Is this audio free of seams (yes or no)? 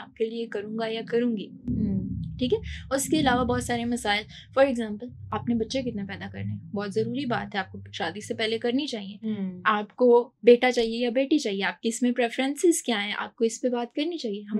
yes